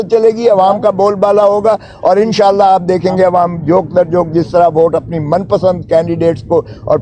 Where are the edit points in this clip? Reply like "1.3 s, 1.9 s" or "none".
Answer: none

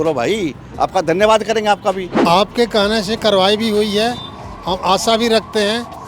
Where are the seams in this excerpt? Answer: 2.1 s

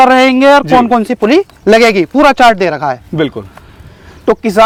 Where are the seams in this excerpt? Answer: none

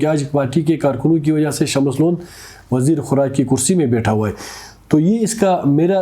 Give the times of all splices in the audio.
none

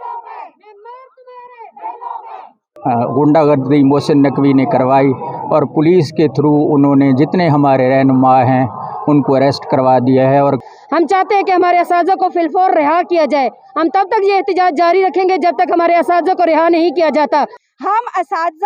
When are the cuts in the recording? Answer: 2.7 s, 10.6 s, 17.6 s

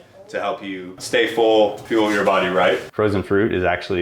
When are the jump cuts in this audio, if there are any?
2.9 s

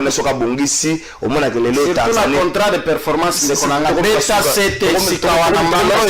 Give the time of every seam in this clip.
none

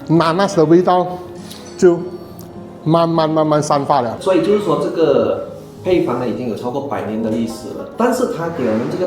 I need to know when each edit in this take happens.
4.1 s

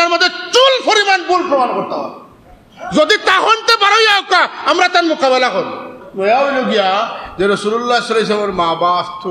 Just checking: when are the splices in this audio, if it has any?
5.9 s

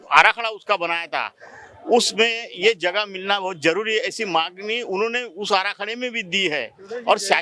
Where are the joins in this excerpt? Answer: none

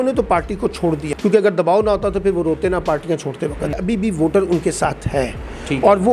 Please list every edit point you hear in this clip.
1.1 s, 3.8 s

